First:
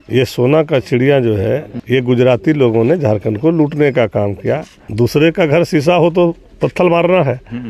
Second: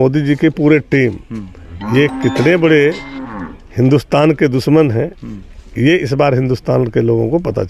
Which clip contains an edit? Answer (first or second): first